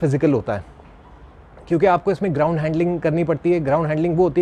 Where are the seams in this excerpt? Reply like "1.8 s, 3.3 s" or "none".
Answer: none